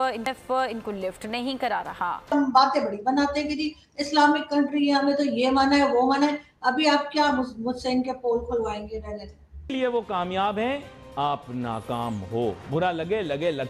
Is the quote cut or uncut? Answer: cut